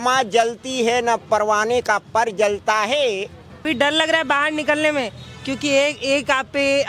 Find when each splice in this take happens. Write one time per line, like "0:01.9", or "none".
0:03.5